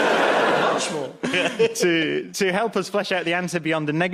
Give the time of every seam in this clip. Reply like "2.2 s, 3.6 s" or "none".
2.1 s

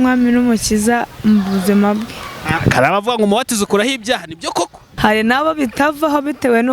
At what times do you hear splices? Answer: 4.9 s

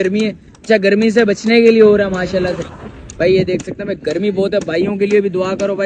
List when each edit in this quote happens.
none

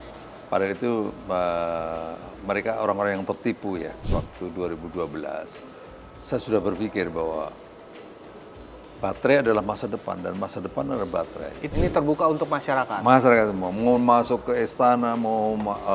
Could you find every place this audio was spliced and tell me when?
4.0 s, 11.7 s

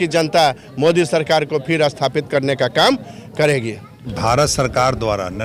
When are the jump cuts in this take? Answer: none

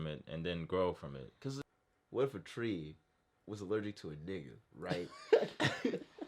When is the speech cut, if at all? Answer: 1.6 s

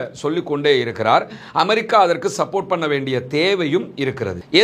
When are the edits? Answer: none

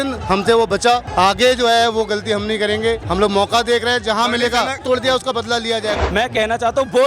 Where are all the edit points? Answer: 1.1 s, 3.0 s, 4.8 s, 5.9 s

